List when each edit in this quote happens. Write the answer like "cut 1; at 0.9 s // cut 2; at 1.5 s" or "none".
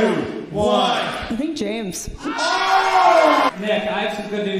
cut 1; at 3.6 s